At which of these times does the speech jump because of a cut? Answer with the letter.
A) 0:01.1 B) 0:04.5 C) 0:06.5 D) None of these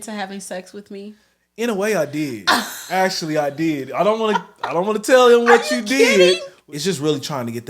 C